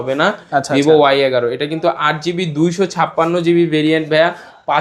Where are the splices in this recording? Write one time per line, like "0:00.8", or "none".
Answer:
none